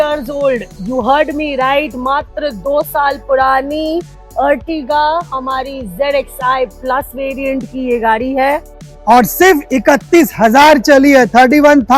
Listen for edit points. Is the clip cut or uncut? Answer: uncut